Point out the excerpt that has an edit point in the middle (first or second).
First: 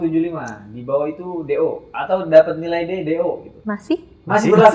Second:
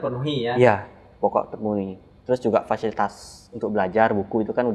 first